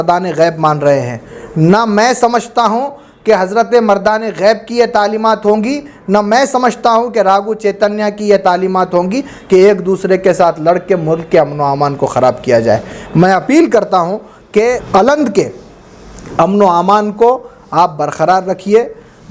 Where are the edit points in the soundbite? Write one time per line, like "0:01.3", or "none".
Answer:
0:14.8